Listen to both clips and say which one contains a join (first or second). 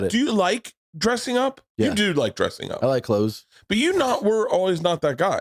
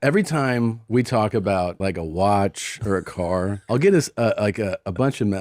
second